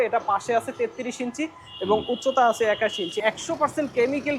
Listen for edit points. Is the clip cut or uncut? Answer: cut